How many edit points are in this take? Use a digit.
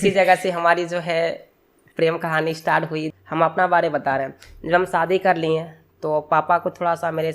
1